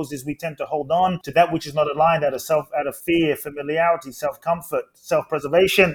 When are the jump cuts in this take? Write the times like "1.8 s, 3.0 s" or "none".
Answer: 1.2 s, 3.0 s